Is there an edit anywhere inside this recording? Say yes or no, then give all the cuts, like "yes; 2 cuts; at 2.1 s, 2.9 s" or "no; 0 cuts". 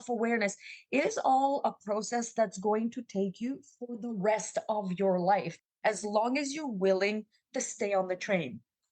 no; 0 cuts